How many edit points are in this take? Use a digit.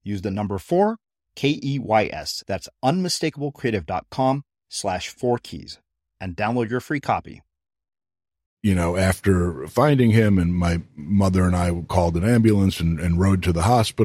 1